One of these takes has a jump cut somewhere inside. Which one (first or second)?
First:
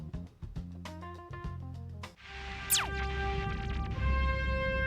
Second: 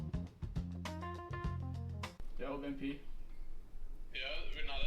second